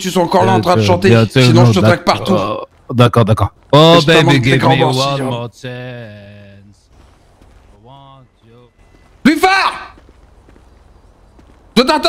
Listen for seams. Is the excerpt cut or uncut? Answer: uncut